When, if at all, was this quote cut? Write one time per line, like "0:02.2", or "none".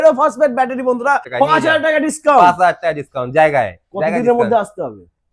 0:01.3